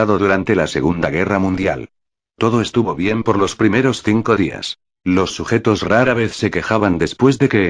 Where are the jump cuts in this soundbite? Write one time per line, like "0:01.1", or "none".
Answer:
0:02.2